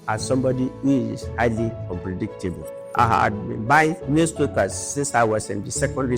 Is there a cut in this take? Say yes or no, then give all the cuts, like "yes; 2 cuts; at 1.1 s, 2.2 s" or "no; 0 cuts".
yes; 2 cuts; at 1.8 s, 2.7 s